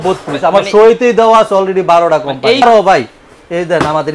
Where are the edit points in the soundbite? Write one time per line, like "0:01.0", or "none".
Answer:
0:02.6